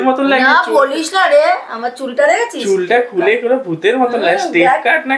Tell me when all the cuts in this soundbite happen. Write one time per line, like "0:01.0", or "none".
none